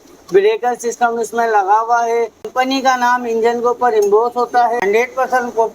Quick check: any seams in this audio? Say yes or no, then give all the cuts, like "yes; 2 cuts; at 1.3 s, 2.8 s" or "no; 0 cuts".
yes; 2 cuts; at 2.5 s, 4.8 s